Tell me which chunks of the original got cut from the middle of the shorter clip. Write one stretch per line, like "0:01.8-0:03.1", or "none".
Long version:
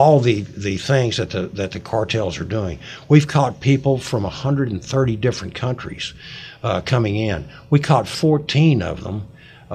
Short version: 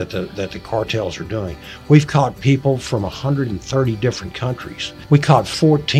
0:06.1-0:07.5